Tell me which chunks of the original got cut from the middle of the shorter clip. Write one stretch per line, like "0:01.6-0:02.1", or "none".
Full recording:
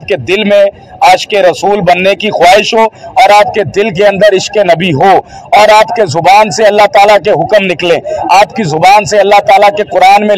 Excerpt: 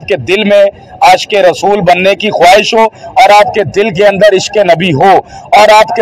none